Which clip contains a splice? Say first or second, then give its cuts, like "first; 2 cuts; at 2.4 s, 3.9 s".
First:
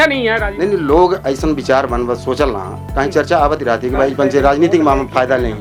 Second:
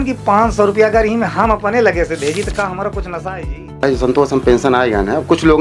second; 1 cut; at 3.8 s